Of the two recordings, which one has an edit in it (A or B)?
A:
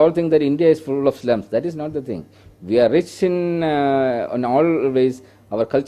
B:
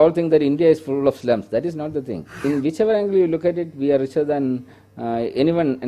B